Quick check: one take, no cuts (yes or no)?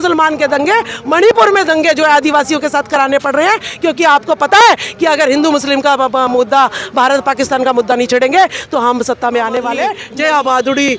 no